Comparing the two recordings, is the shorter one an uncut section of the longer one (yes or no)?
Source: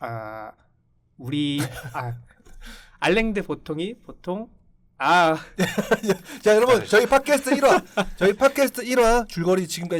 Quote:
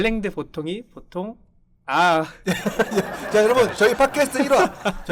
yes